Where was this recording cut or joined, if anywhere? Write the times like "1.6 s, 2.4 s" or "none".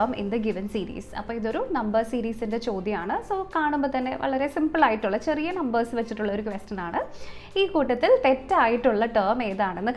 none